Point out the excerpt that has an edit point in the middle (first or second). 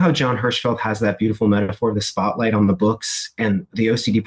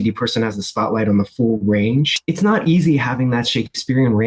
second